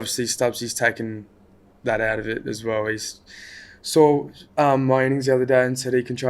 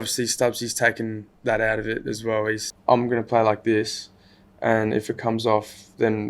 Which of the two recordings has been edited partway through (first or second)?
second